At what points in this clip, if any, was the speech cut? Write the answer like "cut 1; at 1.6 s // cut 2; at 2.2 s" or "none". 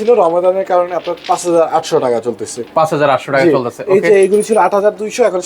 none